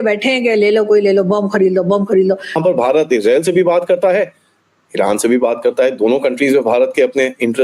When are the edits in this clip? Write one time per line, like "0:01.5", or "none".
0:02.6